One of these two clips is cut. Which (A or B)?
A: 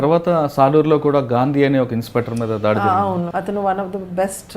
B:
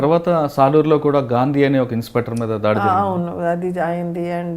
A